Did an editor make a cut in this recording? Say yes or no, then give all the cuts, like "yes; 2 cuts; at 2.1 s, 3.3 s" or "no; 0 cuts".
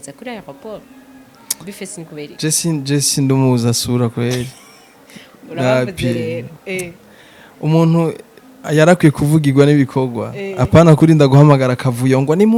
no; 0 cuts